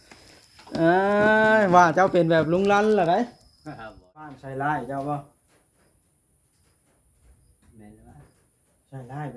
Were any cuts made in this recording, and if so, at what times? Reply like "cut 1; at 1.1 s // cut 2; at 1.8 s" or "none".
cut 1; at 4.4 s